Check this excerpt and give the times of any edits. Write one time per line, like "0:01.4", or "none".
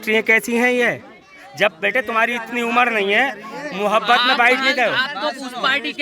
none